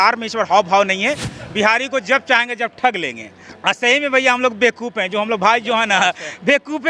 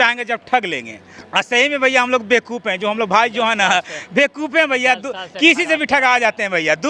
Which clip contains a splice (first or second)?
first